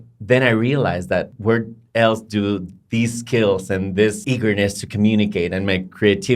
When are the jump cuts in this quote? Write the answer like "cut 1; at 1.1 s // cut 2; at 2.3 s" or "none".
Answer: cut 1; at 1.3 s // cut 2; at 4.2 s